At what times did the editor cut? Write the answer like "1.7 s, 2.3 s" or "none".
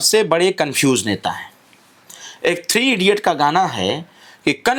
none